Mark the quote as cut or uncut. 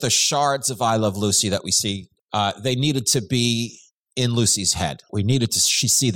cut